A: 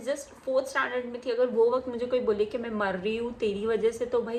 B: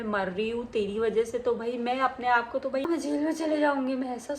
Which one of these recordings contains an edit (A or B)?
B